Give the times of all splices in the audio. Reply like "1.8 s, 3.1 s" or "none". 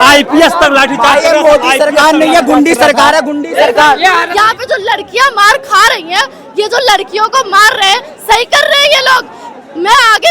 4.2 s